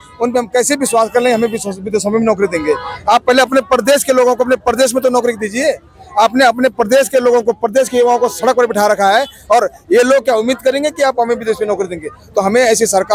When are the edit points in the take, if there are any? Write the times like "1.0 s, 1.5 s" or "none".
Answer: none